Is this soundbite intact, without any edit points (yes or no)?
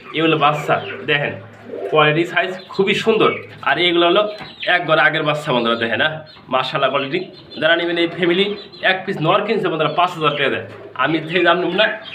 yes